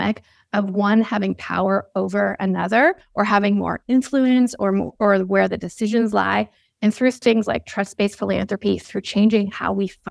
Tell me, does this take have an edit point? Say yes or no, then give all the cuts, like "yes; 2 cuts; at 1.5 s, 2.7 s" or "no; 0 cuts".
no; 0 cuts